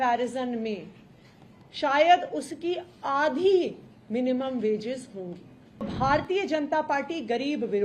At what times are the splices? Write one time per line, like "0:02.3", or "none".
0:05.9

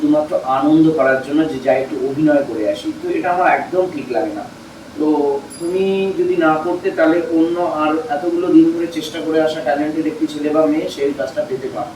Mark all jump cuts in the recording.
none

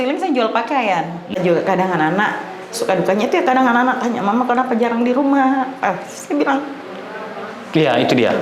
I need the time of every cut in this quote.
0:01.4

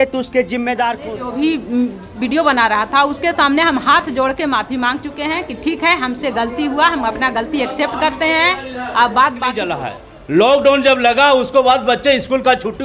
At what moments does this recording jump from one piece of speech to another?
0:01.0
0:09.8

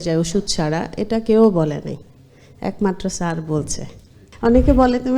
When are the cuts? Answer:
0:04.3

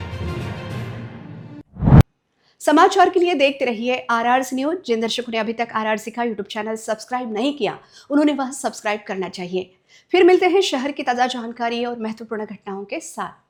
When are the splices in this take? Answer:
none

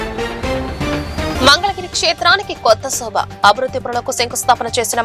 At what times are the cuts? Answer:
0:01.3

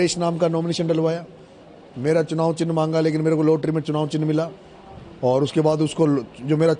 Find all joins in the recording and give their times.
none

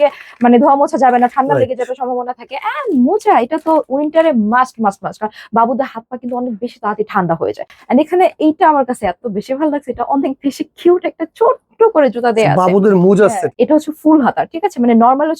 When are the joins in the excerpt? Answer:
0:07.8
0:13.5

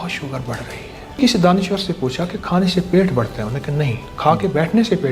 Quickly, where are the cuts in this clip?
0:01.2

